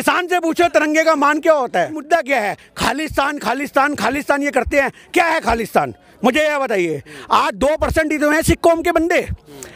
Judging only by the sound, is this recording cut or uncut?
cut